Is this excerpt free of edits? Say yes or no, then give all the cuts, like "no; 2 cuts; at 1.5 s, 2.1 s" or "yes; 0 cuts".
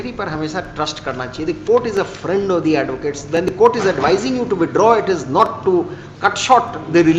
yes; 0 cuts